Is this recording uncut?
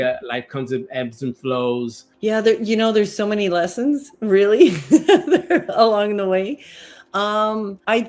no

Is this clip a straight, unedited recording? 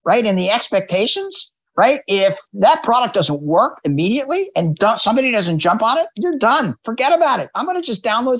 no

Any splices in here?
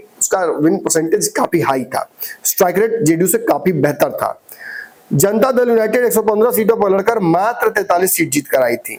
no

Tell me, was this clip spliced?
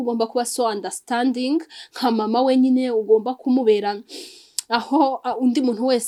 no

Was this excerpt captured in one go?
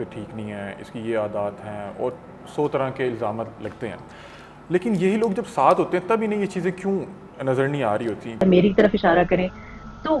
no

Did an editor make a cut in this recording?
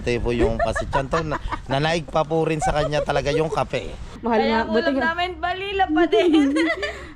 yes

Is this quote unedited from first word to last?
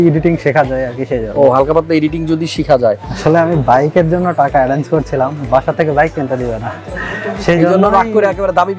no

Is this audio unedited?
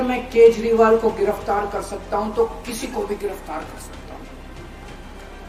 yes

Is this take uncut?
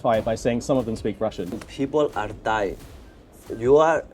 no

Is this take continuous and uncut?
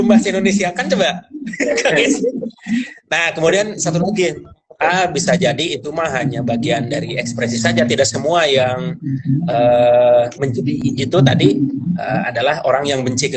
yes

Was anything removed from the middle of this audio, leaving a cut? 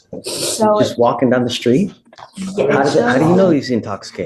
no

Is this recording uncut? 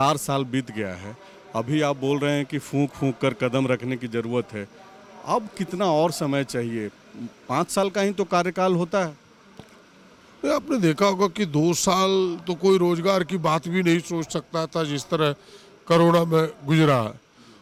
yes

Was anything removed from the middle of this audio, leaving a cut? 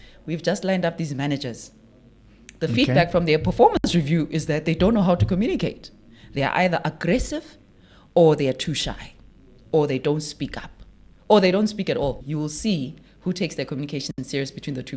yes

